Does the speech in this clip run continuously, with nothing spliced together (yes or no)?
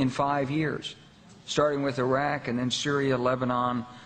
no